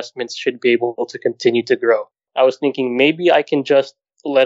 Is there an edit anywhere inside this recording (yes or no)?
yes